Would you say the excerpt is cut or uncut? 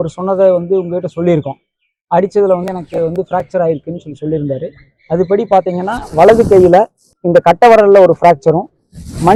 uncut